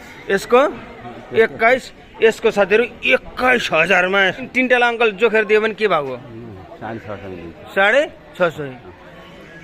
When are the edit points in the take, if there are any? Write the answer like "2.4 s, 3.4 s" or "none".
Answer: 4.4 s